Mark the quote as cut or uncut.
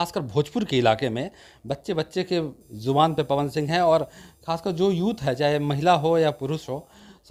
uncut